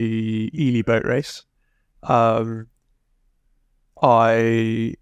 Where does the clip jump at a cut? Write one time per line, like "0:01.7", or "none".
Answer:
none